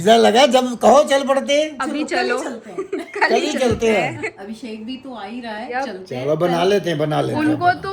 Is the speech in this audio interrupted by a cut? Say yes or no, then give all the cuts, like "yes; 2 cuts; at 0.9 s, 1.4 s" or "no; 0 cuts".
yes; 1 cut; at 4.3 s